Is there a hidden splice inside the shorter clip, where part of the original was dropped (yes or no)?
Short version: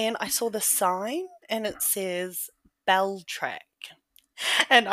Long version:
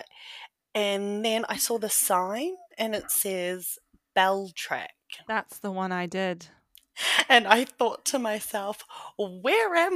yes